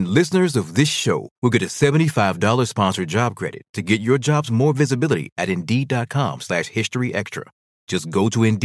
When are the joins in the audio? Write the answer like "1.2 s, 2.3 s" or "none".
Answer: none

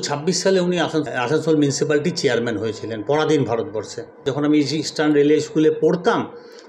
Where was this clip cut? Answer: 1.1 s, 4.2 s

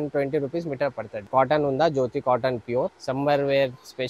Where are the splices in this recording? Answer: 1.3 s, 3.0 s

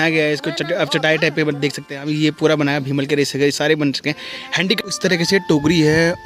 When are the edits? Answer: 4.8 s

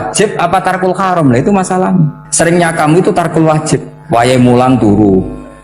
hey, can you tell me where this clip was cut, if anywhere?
2.2 s, 3.9 s

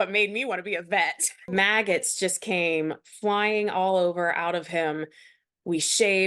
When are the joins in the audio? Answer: 1.5 s

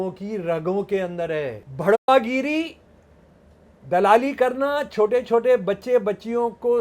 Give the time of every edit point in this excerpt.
1.6 s

